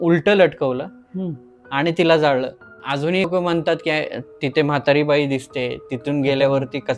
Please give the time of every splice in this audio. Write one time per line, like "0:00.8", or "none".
0:02.8